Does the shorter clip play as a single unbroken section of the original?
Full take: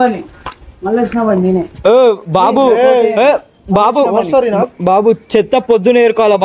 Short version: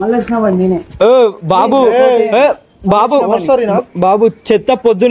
yes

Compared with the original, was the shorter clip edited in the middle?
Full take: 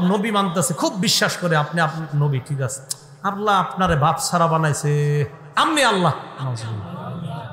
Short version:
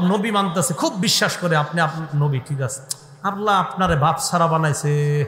no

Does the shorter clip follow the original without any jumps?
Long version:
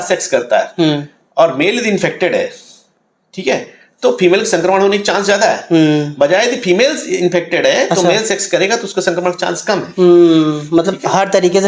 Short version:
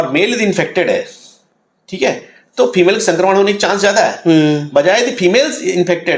yes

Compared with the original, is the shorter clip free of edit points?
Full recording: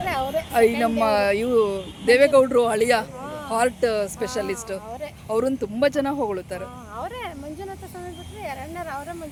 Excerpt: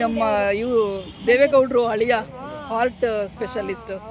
yes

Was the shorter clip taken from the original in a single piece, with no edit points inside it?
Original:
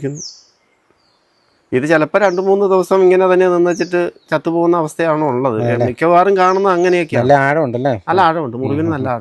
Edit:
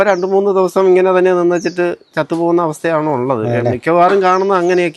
yes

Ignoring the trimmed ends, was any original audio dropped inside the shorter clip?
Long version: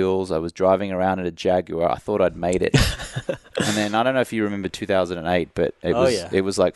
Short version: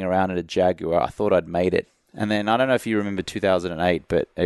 yes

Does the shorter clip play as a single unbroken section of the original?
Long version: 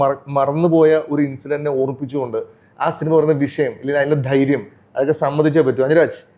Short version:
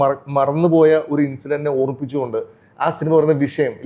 yes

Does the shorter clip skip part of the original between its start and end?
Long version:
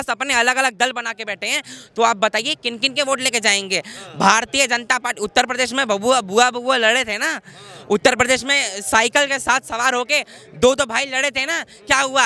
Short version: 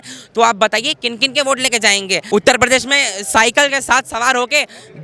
yes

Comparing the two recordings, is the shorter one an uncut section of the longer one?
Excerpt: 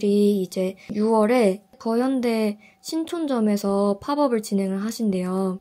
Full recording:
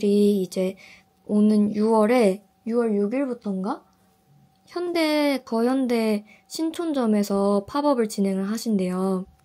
no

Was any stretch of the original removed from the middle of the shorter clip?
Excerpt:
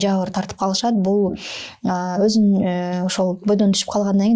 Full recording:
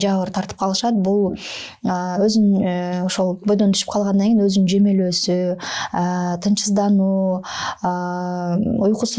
no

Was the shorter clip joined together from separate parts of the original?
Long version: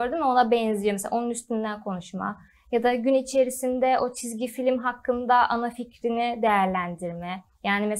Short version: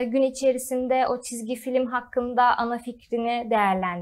no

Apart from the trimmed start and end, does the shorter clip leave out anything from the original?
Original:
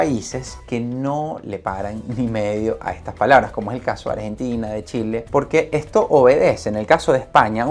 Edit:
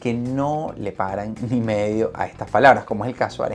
no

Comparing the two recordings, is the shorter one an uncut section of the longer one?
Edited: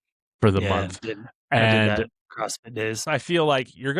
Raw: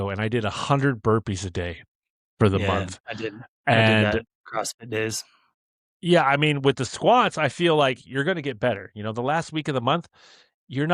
no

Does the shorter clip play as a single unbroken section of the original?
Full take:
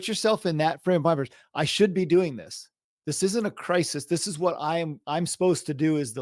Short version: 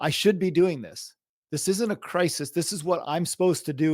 no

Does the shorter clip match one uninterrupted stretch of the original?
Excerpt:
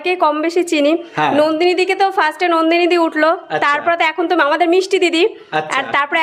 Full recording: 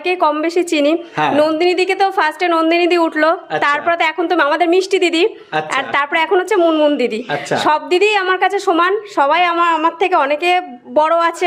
yes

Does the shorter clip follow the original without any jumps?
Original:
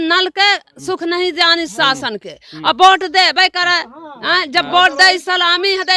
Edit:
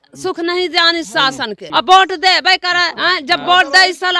no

